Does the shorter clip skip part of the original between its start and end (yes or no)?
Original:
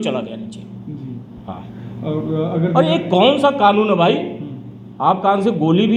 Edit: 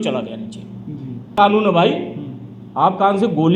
yes